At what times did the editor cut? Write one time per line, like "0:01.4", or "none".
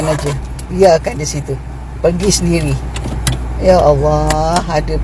none